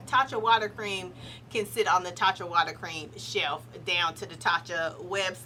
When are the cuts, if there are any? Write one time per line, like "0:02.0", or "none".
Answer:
none